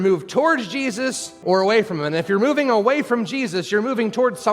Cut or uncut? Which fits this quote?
cut